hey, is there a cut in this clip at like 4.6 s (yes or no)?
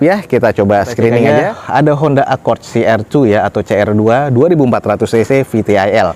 no